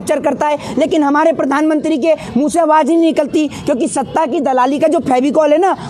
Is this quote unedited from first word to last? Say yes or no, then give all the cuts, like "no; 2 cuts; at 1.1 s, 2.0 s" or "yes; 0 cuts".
yes; 0 cuts